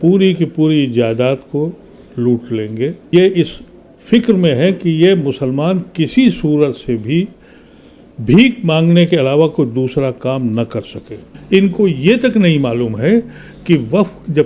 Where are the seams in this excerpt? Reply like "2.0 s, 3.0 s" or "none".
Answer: 3.1 s, 11.3 s